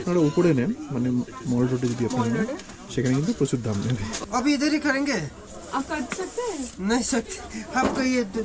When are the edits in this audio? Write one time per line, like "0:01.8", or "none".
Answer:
0:04.1